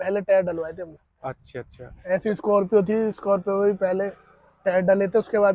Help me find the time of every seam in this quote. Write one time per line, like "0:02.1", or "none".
none